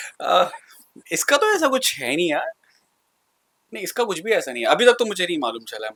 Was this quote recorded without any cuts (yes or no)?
yes